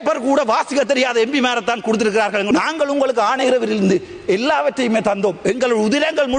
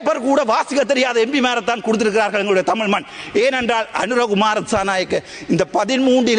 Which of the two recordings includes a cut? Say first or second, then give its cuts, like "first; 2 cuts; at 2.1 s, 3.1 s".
first; 1 cut; at 2.5 s